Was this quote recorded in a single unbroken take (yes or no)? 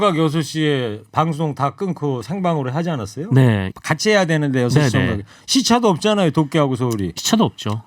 no